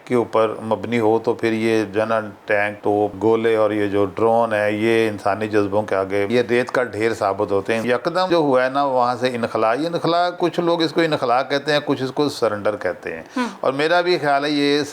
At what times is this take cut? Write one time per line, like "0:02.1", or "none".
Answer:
0:02.9
0:06.3
0:08.0
0:10.4